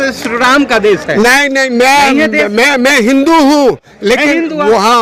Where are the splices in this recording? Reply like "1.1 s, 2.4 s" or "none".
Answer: none